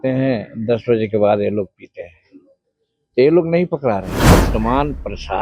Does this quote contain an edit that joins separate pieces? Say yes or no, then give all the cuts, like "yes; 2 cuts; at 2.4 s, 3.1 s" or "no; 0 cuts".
yes; 1 cut; at 4.3 s